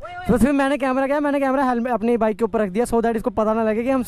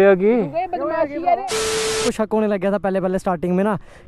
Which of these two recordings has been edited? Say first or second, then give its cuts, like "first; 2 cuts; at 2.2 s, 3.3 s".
second; 1 cut; at 2.0 s